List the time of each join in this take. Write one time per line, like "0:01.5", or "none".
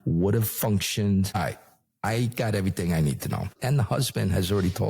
0:01.3
0:03.5